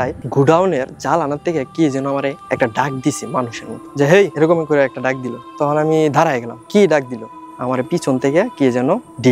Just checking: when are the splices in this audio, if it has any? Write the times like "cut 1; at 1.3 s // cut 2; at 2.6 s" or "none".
cut 1; at 3.8 s // cut 2; at 7.5 s